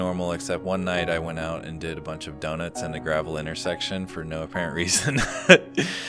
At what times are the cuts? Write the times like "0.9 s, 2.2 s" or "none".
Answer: none